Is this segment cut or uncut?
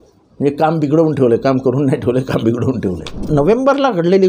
cut